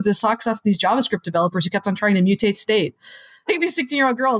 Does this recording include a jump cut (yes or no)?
yes